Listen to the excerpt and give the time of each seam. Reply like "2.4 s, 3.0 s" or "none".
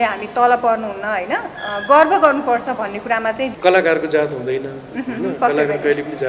3.5 s